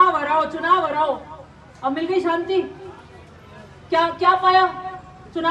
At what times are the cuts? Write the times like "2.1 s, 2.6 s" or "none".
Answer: none